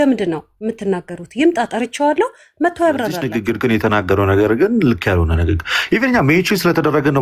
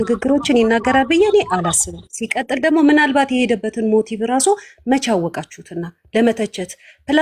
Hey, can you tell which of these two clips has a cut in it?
first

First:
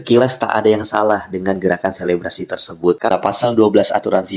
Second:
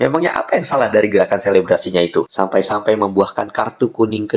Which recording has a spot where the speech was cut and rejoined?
first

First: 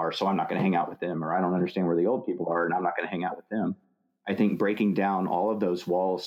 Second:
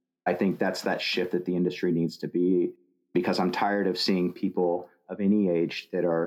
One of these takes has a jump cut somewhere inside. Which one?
second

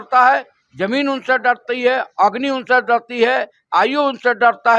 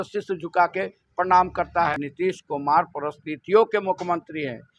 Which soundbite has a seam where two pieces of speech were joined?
second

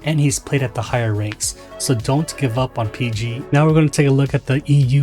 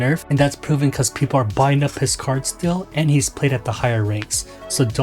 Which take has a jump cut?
first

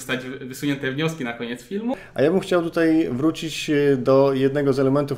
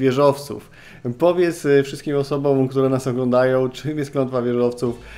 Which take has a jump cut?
first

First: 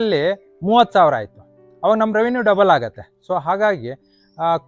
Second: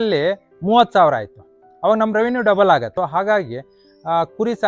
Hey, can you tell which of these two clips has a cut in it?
second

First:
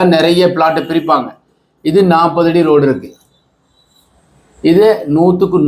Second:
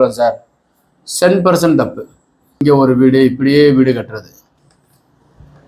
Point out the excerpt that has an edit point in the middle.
second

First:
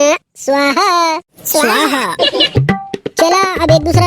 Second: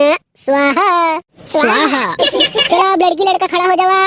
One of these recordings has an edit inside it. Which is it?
first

